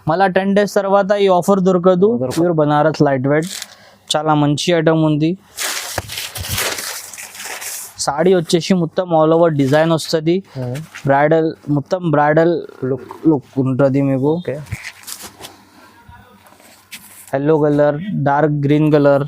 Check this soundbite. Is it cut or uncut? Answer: cut